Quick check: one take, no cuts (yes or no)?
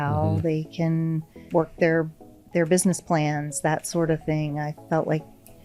no